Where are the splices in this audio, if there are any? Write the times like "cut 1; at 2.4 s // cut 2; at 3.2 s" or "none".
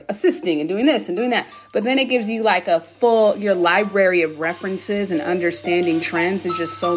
none